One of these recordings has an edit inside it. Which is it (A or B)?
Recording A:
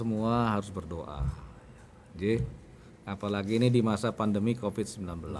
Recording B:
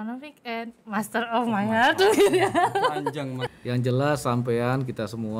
B